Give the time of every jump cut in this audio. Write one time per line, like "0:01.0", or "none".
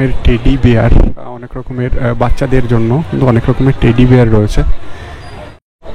none